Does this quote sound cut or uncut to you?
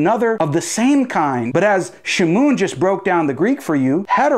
cut